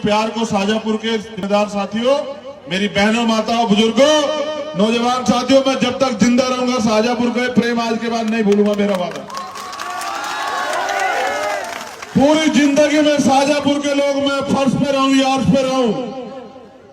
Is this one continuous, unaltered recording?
no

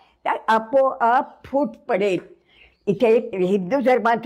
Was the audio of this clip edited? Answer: no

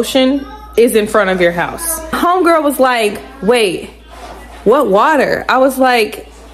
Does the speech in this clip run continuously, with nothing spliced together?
no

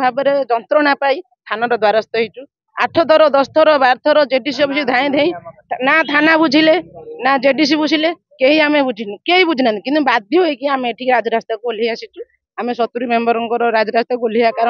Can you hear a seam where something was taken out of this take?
no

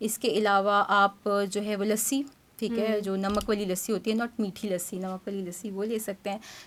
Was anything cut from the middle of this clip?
no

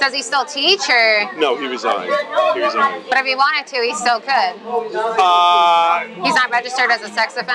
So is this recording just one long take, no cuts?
yes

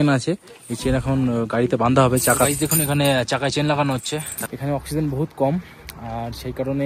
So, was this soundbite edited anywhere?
yes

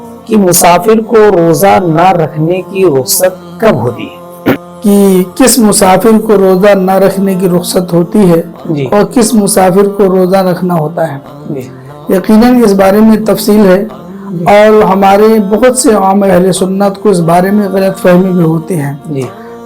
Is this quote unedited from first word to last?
no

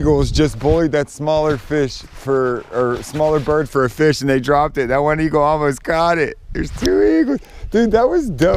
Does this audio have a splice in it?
no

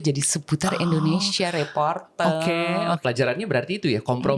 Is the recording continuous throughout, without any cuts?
no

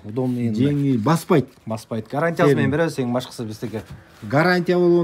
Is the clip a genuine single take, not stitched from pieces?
yes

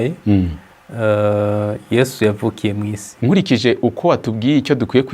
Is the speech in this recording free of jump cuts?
no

